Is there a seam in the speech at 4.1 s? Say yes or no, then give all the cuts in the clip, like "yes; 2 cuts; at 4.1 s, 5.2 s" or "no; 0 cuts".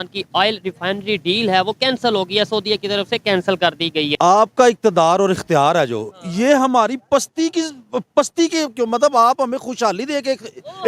yes; 1 cut; at 4.1 s